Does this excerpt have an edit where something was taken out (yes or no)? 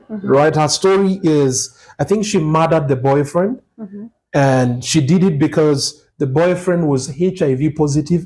no